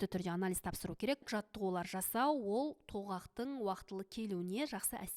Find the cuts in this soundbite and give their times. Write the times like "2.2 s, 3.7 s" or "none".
1.2 s